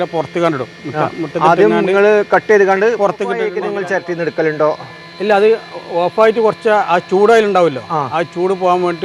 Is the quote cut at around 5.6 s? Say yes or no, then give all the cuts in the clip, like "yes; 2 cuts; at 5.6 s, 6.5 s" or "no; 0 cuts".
no; 1 cut; at 3.5 s